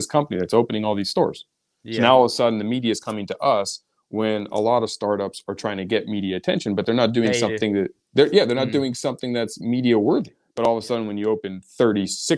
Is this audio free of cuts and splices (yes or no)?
no